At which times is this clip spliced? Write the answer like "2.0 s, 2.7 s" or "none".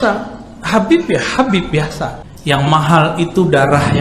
2.3 s